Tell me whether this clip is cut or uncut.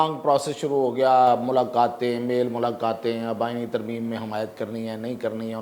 uncut